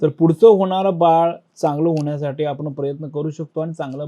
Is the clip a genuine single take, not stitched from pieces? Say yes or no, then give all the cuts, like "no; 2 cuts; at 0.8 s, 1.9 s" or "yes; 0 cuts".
yes; 0 cuts